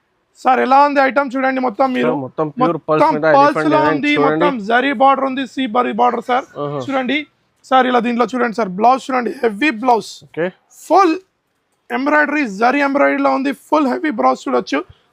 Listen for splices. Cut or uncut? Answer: uncut